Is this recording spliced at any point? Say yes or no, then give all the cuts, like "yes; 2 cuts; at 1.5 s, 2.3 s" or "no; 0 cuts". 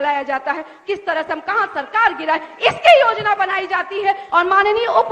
yes; 1 cut; at 4.2 s